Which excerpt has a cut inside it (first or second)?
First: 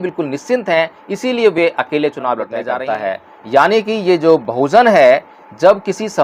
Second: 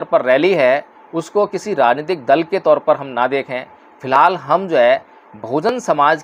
first